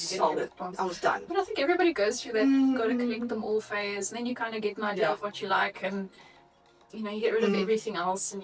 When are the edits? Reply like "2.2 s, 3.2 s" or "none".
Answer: none